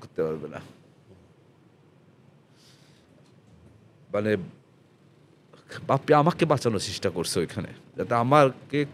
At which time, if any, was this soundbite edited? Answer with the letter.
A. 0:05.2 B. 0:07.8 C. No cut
C